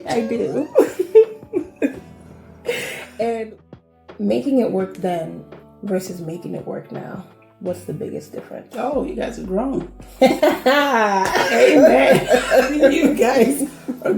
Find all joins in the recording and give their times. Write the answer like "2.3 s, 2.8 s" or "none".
3.9 s